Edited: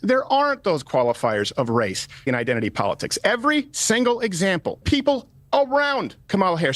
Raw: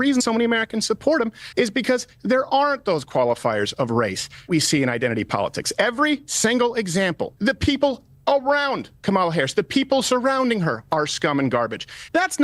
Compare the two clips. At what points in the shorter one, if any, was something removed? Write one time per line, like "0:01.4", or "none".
0:02.3
0:05.2